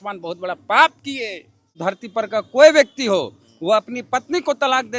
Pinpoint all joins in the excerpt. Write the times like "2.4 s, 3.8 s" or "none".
1.7 s